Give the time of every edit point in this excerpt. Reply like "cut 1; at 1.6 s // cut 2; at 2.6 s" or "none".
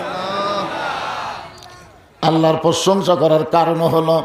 none

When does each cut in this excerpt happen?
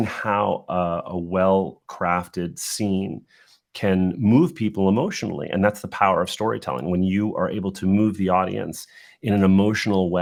none

